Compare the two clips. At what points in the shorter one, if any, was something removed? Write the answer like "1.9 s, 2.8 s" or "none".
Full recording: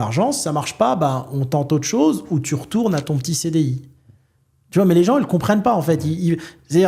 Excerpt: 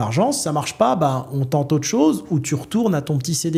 none